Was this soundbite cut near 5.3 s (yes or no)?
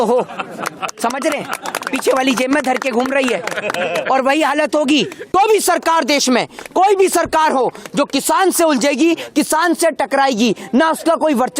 yes